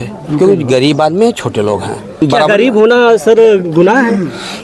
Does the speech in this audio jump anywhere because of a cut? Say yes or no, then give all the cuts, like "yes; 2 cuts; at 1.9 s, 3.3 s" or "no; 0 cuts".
yes; 1 cut; at 2.2 s